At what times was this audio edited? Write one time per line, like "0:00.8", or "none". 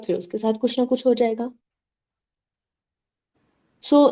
none